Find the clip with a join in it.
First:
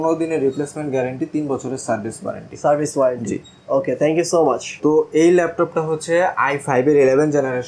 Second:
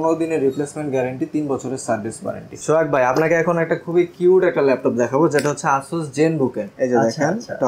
second; 2 cuts; at 2.5 s, 6.7 s

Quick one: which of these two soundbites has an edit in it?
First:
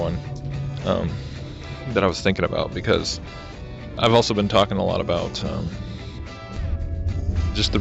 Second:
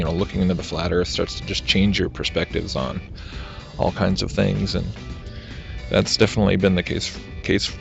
first; 1 cut; at 2.8 s

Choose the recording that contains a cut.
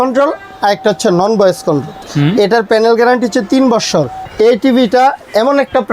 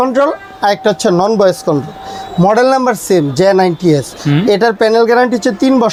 first; 2 cuts; at 2.0 s, 4.2 s

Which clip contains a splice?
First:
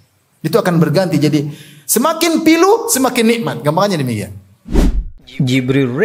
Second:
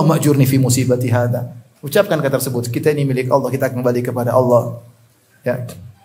first; 1 cut; at 4.6 s

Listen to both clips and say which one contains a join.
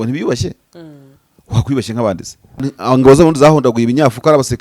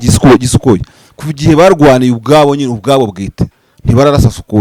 first; 1 cut; at 2.7 s

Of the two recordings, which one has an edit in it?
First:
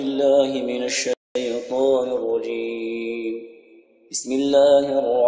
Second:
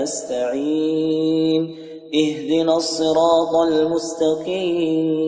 first; 1 cut; at 1.1 s

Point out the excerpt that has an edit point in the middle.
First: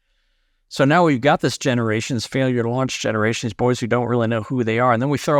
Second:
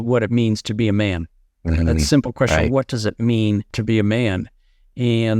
second; 1 cut; at 3.7 s

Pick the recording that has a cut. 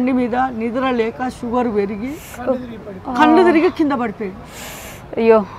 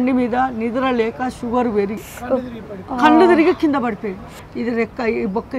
second; 2 cuts; at 2.1 s, 4.5 s

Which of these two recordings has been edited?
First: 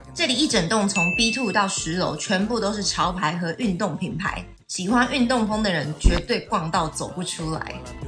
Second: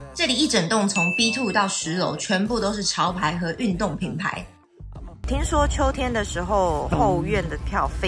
second; 1 cut; at 4.9 s

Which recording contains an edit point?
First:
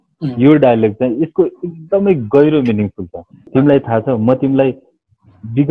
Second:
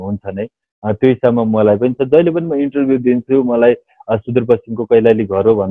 first; 1 cut; at 3.3 s

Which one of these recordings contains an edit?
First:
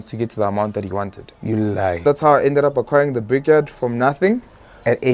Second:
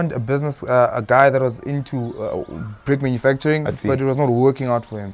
first; 1 cut; at 2.0 s

